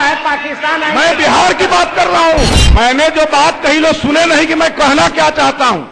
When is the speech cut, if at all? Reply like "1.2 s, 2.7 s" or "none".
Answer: 2.5 s